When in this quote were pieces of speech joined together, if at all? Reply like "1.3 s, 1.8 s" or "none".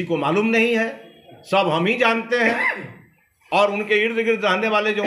none